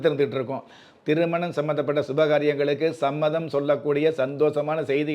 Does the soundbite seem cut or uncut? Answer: cut